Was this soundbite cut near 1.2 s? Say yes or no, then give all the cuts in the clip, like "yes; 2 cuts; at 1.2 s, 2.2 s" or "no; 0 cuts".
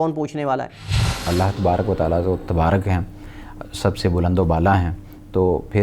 yes; 1 cut; at 1.2 s